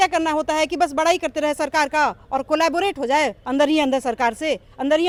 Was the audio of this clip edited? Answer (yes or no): no